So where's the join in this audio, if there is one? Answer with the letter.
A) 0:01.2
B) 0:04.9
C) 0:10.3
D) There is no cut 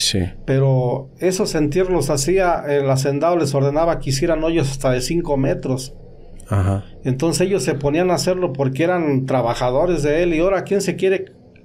D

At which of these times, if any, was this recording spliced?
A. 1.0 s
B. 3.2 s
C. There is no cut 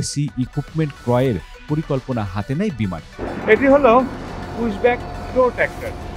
B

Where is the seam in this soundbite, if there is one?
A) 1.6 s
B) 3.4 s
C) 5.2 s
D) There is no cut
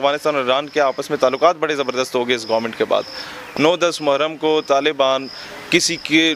B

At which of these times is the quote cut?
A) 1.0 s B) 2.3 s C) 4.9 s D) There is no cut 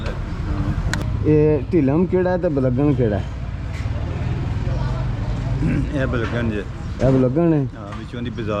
A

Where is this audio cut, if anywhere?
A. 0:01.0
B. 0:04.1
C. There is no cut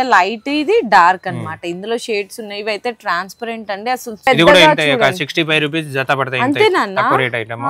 B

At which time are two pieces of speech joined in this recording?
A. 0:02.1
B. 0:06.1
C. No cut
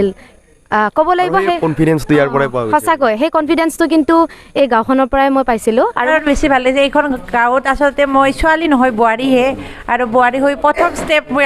B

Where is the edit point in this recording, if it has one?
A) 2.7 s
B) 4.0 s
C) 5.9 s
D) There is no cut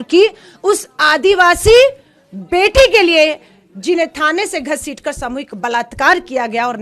D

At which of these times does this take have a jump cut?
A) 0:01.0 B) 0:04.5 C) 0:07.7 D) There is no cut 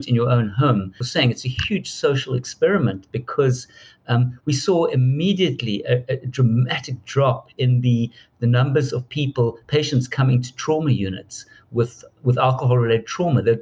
A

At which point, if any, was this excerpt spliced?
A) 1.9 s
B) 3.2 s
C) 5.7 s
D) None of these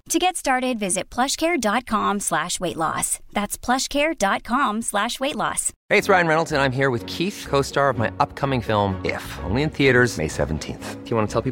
C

